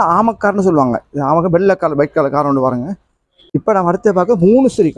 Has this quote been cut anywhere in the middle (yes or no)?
yes